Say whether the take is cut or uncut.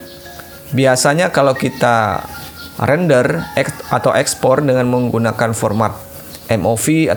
uncut